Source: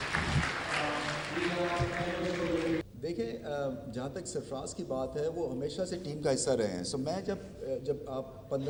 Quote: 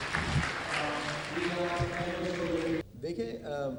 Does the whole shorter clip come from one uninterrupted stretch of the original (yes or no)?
yes